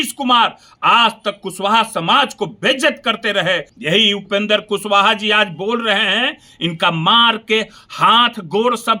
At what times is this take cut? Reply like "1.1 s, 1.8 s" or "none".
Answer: 3.7 s